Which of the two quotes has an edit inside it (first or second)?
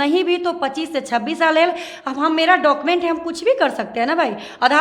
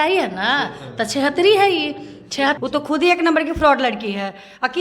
second